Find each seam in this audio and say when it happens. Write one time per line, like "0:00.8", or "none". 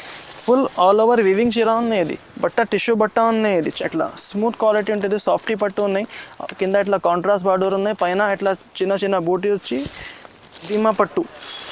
0:03.7
0:10.7